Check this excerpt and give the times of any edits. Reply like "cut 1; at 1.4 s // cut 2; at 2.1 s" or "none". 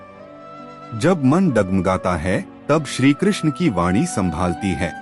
cut 1; at 0.9 s